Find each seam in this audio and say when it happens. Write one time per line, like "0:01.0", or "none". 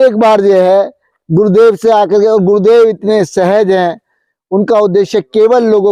none